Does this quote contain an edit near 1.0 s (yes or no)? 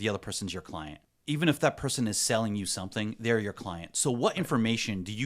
yes